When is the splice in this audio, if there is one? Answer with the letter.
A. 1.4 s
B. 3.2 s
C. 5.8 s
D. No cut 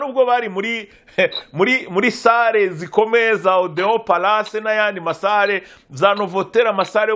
D